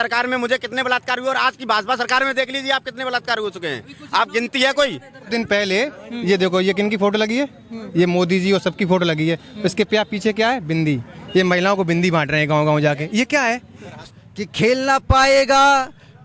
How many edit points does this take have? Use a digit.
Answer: 2